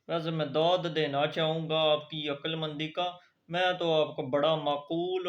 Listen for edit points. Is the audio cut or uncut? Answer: uncut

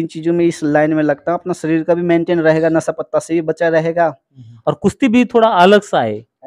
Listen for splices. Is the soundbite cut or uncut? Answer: cut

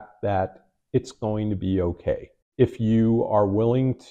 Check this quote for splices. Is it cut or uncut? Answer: uncut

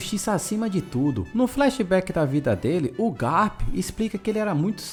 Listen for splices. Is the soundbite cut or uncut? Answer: uncut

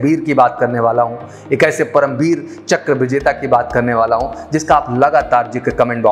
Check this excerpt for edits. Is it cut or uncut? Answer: uncut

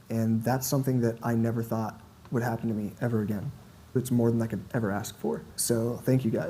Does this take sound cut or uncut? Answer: cut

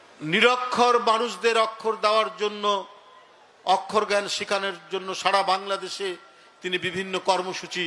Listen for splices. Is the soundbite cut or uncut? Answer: uncut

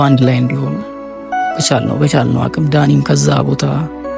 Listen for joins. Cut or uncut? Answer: uncut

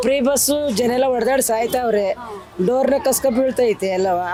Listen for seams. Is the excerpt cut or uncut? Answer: uncut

